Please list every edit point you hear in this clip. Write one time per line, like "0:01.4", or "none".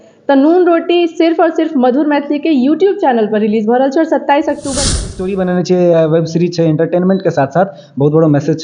0:04.9

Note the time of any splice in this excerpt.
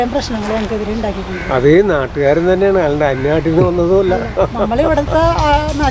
none

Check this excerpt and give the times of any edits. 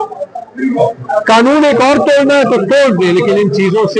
none

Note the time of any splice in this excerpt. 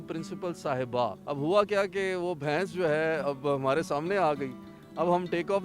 0:01.2

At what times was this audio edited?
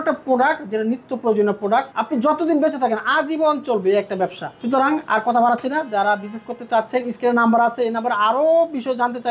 none

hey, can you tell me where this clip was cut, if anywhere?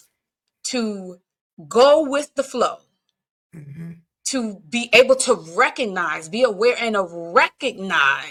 none

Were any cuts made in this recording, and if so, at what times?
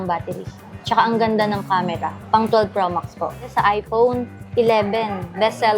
0:03.5

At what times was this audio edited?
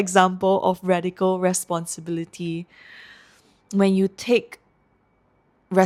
none

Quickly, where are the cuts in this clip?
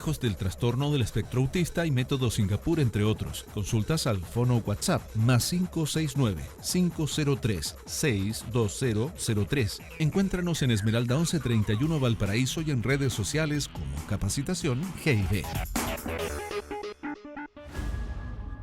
0:17.6

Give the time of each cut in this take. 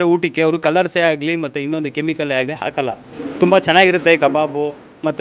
none

